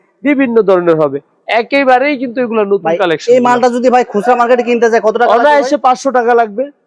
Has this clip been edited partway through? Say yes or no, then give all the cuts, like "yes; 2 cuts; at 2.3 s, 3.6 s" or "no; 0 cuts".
no; 0 cuts